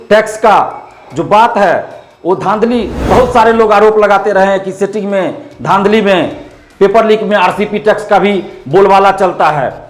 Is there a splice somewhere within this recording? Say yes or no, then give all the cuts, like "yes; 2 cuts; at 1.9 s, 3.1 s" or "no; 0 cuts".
yes; 1 cut; at 3.1 s